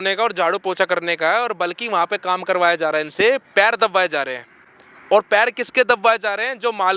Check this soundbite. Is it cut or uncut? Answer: uncut